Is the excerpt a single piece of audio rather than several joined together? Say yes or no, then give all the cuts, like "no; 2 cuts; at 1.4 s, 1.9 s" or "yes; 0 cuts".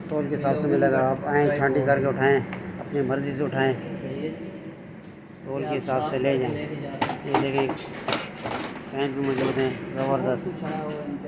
yes; 0 cuts